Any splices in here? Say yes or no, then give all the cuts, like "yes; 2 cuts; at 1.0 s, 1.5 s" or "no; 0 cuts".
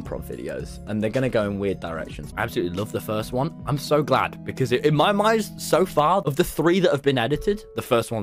yes; 2 cuts; at 2.2 s, 6.3 s